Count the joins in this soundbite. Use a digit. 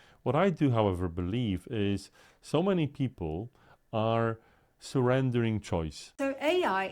1